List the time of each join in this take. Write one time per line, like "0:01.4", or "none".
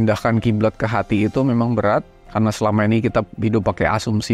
0:02.2